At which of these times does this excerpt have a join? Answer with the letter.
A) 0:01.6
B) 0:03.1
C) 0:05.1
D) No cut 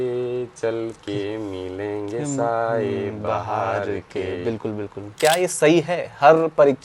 C